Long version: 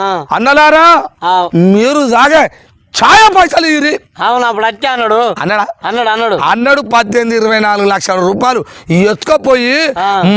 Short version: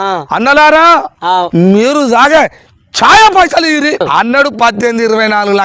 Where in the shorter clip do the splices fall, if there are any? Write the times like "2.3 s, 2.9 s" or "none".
4.0 s

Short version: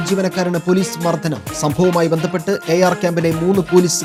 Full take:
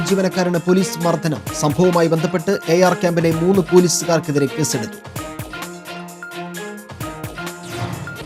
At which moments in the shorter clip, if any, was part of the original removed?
none

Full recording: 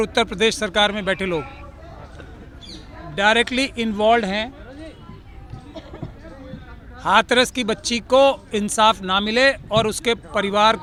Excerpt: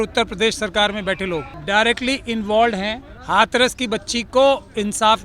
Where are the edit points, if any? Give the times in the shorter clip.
1.5 s, 3.1 s

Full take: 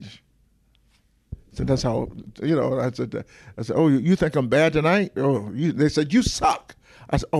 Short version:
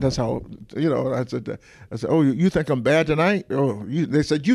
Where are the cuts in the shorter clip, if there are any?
none

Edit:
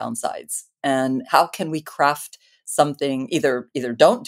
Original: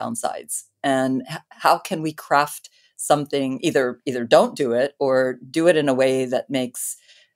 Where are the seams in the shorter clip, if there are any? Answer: 1.2 s

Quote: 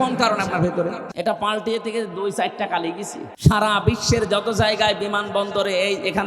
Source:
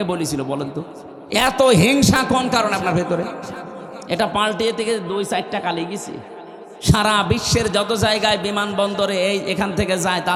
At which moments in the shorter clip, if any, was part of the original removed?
1.1 s, 3.2 s

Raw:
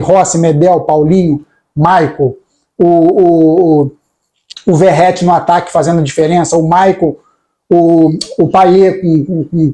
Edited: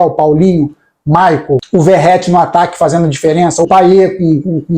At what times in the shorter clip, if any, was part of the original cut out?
1.6 s, 3.7 s

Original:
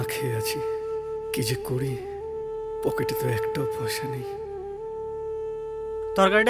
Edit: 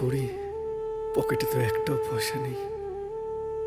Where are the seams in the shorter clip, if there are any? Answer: none

